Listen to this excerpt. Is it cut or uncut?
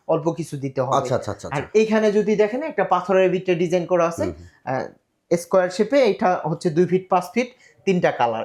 uncut